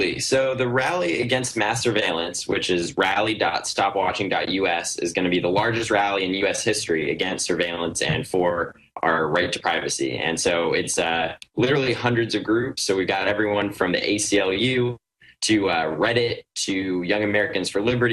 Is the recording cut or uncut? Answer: cut